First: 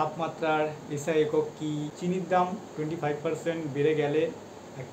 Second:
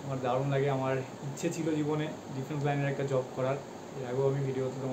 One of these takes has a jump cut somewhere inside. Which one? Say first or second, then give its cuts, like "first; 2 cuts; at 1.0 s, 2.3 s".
first; 1 cut; at 1.9 s